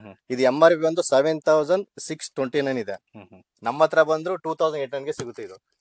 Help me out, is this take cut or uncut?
uncut